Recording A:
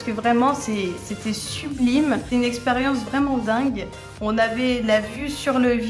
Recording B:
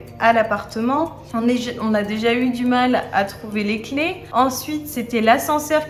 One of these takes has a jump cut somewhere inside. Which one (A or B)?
A